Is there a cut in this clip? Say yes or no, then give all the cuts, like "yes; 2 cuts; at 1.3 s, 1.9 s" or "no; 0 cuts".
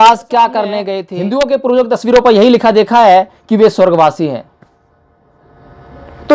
yes; 1 cut; at 1.0 s